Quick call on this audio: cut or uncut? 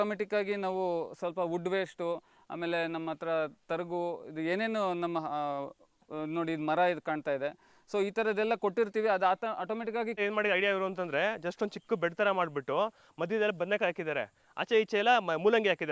cut